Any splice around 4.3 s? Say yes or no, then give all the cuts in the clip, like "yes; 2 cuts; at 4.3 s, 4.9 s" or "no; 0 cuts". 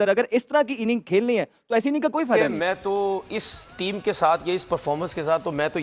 no; 1 cut; at 2.5 s